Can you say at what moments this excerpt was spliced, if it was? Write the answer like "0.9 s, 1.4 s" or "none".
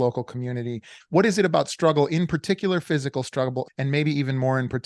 0.9 s, 3.7 s

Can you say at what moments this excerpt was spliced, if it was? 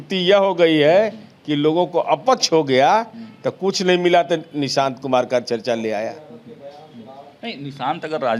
none

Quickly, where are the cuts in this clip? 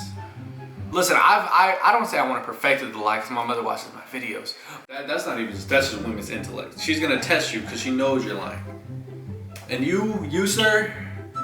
4.6 s

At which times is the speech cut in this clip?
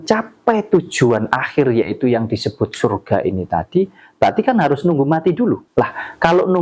5.6 s

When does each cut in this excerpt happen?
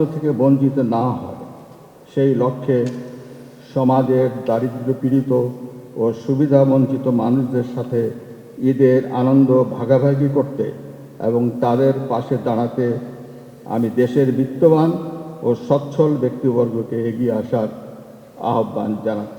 none

